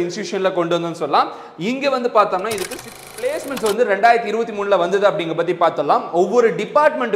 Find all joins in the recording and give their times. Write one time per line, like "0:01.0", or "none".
0:03.2

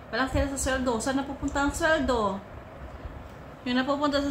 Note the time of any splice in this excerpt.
none

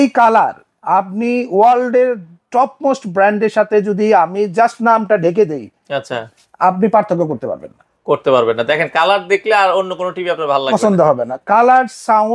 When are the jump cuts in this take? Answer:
none

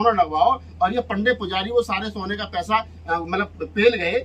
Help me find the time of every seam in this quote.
none

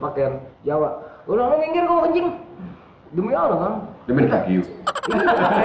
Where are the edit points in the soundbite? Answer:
none

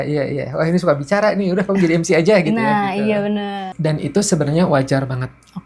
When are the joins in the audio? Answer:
0:03.7

